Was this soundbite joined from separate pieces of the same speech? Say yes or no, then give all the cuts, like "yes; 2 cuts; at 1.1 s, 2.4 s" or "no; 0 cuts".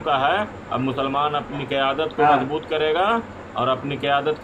no; 0 cuts